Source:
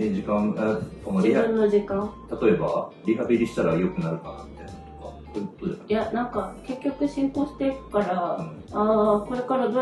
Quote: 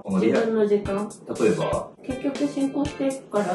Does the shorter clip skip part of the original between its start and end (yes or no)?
yes